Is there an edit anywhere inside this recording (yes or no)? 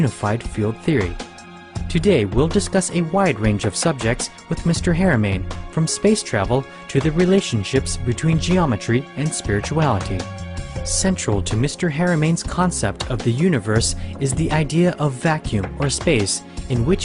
no